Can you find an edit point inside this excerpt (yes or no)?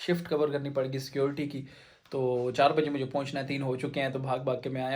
no